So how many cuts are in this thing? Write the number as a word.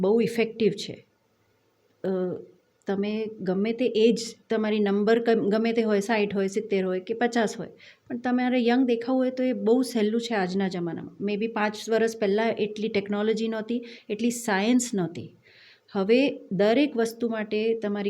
zero